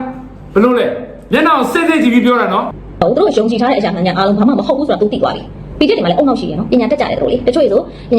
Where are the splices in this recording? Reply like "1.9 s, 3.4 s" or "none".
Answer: 2.8 s